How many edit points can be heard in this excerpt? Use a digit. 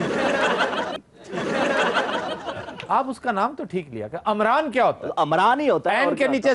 1